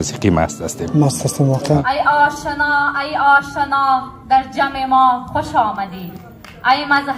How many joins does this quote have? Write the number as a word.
one